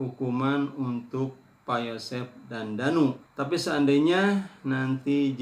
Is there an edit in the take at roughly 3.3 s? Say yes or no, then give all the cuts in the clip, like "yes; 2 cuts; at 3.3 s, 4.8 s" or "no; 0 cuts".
yes; 1 cut; at 3.3 s